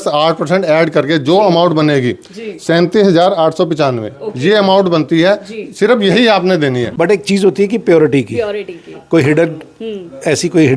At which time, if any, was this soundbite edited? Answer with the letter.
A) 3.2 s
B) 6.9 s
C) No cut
B